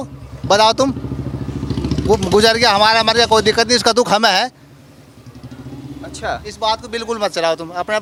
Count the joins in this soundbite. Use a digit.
0